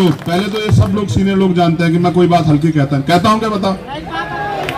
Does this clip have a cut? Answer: no; 0 cuts

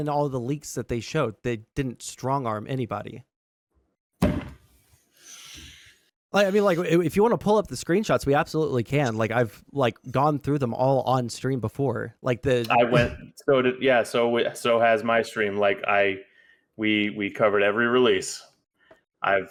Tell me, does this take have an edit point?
no; 0 cuts

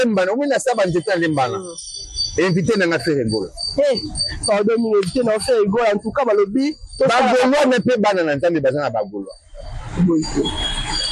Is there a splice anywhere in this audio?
no; 0 cuts

